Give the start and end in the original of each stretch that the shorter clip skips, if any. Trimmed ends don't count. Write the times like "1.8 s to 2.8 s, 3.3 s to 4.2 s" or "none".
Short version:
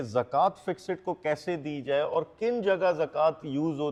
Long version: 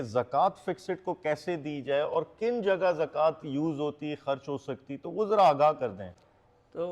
none